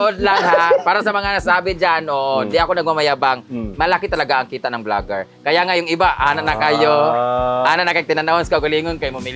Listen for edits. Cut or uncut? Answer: uncut